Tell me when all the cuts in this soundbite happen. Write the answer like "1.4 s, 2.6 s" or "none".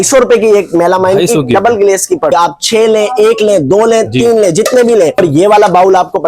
2.3 s, 5.2 s